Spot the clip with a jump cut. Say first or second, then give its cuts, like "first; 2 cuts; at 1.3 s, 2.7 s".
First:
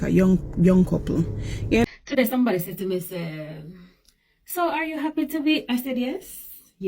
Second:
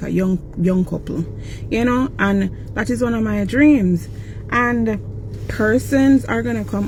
first; 1 cut; at 1.8 s